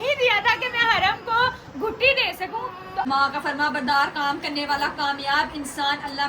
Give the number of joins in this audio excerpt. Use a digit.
1